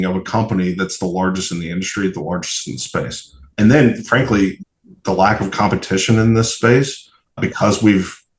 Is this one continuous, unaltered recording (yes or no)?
no